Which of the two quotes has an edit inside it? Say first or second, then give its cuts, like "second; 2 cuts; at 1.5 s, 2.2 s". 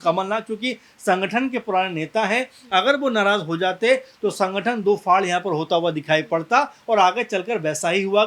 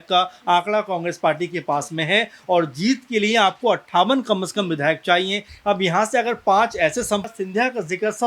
second; 1 cut; at 7.3 s